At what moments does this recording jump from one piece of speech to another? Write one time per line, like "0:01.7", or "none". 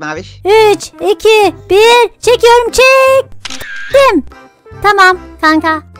0:01.6